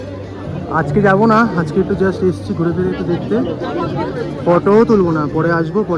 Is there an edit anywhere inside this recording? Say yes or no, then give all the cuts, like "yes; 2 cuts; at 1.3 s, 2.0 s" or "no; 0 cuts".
no; 0 cuts